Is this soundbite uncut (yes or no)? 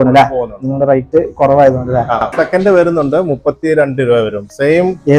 no